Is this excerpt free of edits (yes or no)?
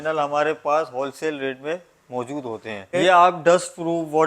no